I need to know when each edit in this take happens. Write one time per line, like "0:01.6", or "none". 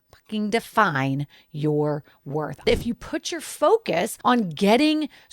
0:02.7
0:04.1